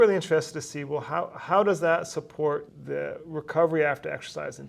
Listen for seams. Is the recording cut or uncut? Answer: cut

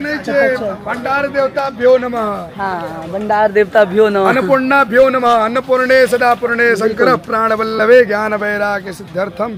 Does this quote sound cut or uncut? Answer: uncut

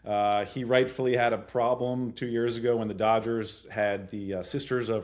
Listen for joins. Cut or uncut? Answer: uncut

